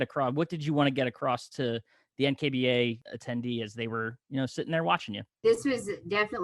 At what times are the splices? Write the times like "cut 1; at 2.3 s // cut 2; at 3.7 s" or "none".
cut 1; at 3.0 s // cut 2; at 5.4 s